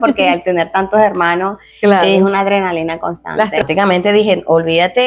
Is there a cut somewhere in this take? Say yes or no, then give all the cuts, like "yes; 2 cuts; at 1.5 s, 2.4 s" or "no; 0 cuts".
yes; 1 cut; at 3.6 s